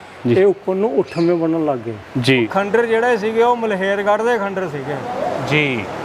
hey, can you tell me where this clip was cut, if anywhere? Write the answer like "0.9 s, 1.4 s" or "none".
2.5 s